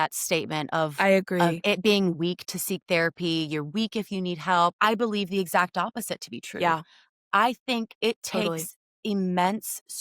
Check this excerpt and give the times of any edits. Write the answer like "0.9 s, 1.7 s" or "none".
4.7 s